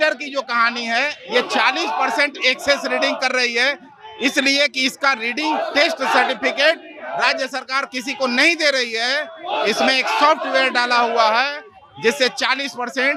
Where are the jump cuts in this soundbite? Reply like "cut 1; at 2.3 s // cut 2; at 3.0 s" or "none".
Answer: none